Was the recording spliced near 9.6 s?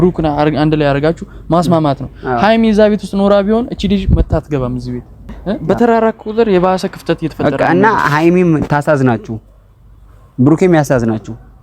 no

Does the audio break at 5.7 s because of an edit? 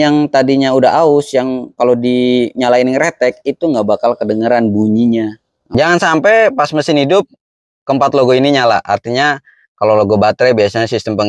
yes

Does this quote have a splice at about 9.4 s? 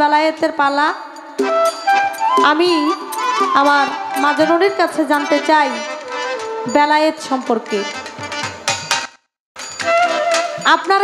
no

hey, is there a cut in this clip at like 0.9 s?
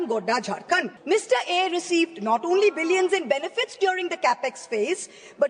yes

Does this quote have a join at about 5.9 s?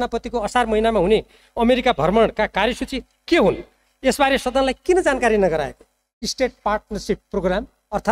no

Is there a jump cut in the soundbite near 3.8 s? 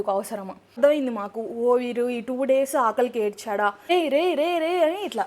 yes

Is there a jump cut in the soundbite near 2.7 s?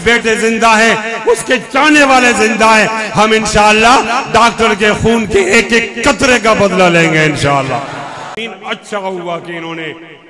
no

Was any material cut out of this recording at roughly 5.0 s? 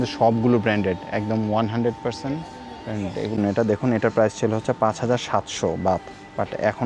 no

